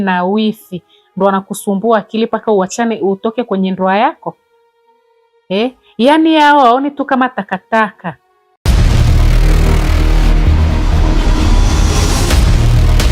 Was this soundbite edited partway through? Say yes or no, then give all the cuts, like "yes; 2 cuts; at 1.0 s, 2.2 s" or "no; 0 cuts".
yes; 1 cut; at 8.7 s